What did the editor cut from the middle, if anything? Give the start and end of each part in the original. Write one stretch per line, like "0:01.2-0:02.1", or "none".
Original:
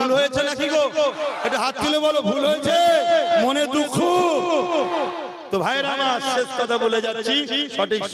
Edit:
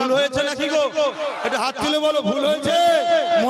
none